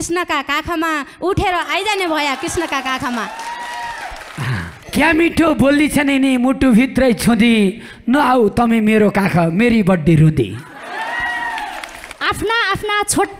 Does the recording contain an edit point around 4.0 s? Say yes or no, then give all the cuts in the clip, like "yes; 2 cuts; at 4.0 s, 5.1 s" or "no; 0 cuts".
no; 0 cuts